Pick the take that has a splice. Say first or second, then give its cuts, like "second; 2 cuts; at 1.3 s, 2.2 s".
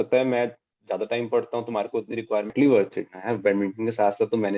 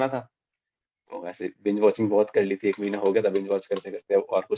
first; 1 cut; at 2.5 s